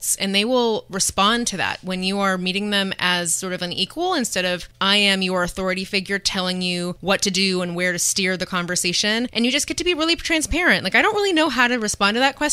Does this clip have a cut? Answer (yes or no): yes